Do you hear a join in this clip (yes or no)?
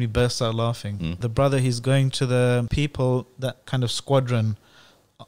yes